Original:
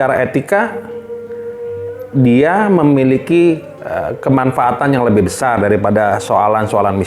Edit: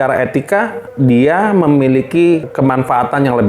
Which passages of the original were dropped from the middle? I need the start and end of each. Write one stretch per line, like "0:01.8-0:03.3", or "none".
0:00.8-0:02.0
0:03.6-0:04.2